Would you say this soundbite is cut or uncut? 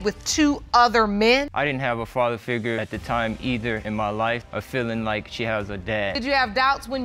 cut